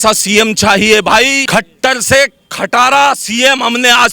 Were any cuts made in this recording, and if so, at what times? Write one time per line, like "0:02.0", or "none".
0:01.4